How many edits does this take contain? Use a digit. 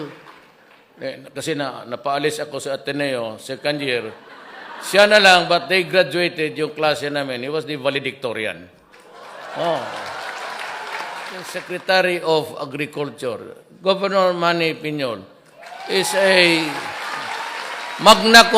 1